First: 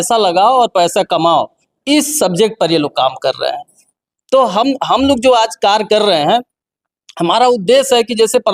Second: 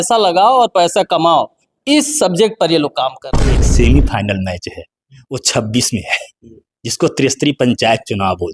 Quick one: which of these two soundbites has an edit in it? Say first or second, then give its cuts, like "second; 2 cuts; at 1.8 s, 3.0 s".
second; 1 cut; at 3.6 s